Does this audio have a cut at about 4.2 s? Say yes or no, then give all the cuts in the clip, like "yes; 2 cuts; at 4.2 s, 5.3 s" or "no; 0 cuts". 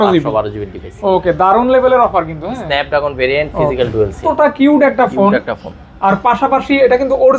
yes; 1 cut; at 4.2 s